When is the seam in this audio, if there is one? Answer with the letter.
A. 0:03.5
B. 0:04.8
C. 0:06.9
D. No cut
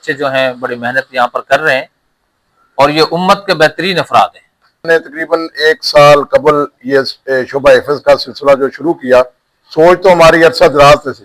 B